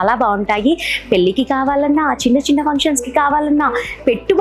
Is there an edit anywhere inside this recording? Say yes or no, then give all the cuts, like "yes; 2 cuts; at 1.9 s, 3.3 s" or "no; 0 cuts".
no; 0 cuts